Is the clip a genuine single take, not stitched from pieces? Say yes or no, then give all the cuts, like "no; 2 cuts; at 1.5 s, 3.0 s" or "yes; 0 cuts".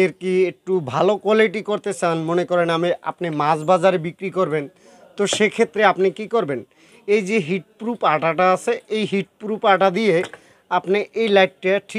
yes; 0 cuts